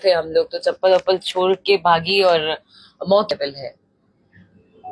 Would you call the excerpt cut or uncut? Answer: cut